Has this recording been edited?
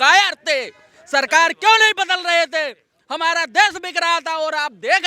no; 0 cuts

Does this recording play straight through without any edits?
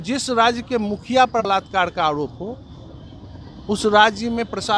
no; 1 cut; at 1.5 s

